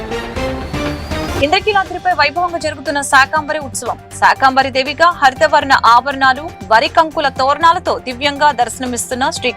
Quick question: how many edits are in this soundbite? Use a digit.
1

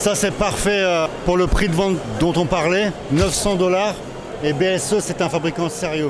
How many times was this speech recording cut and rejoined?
3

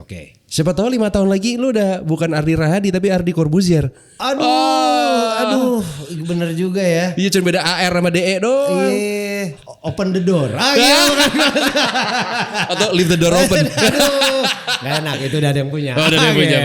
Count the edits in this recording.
1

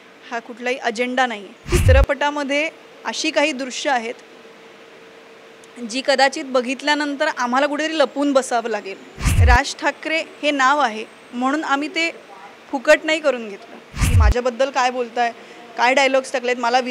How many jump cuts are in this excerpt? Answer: 3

